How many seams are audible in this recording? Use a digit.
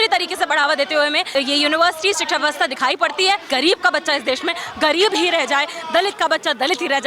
2